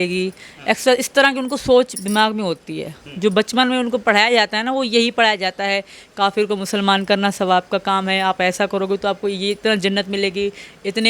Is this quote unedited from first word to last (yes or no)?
yes